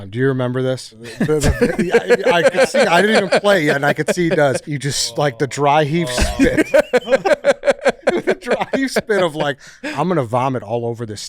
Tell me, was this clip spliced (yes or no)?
yes